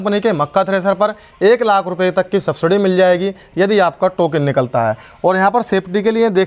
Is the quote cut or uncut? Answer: uncut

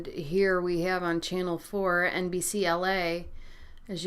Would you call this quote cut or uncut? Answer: cut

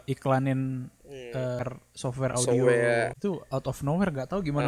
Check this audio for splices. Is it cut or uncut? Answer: cut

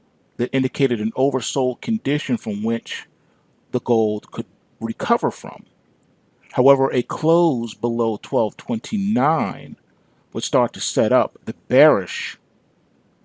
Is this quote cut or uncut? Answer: cut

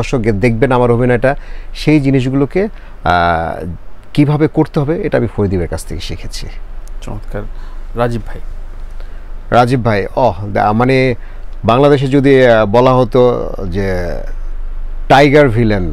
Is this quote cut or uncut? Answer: uncut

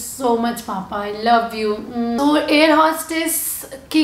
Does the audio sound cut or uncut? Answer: cut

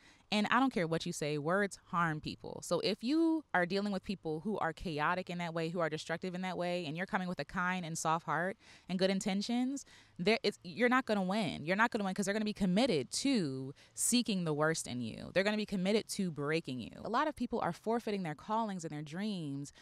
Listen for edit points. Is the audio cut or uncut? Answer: cut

